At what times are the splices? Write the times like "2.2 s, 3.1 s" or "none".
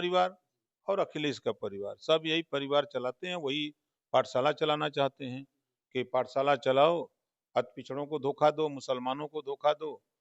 none